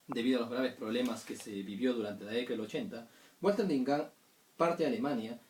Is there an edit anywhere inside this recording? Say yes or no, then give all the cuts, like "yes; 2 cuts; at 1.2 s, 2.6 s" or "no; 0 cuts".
yes; 1 cut; at 1.3 s